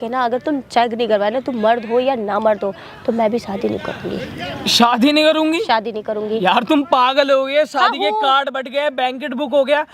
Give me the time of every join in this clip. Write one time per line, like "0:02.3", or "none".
none